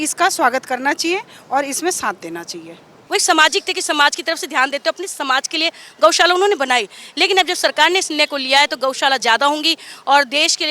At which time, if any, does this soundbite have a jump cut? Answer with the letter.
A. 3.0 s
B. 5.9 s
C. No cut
A